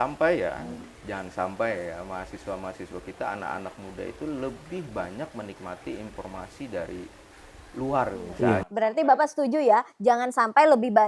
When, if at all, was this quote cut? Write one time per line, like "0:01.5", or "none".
0:08.7